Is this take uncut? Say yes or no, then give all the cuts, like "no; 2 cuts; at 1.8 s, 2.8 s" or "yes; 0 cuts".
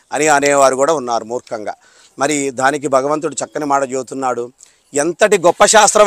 yes; 0 cuts